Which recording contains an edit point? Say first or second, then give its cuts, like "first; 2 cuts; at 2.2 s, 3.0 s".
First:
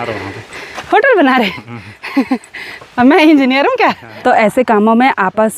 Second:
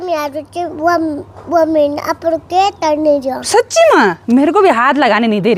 first; 1 cut; at 4.1 s